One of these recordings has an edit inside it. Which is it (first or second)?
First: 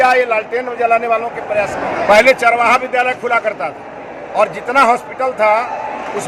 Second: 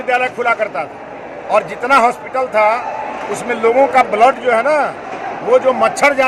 first